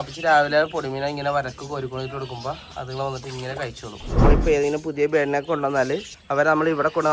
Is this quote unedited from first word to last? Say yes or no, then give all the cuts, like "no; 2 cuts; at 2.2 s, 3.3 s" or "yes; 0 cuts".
no; 2 cuts; at 4.2 s, 6.1 s